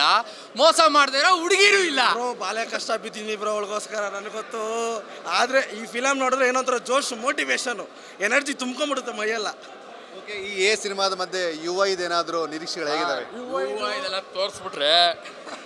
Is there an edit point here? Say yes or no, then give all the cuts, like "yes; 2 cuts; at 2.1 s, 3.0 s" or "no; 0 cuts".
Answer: no; 0 cuts